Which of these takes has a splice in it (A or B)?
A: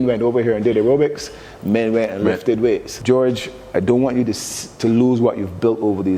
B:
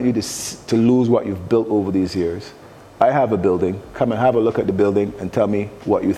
A